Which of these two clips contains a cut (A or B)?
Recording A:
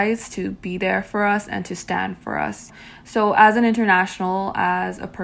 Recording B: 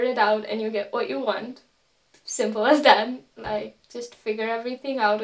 A